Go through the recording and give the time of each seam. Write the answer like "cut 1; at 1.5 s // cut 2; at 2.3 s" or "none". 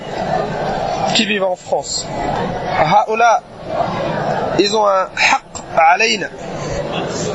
cut 1; at 2.4 s